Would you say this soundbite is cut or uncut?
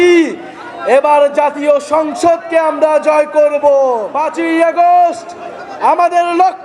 cut